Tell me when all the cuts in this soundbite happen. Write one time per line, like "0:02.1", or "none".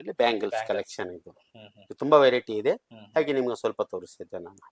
none